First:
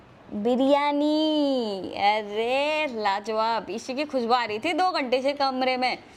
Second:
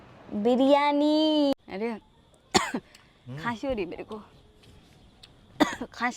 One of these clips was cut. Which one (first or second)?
second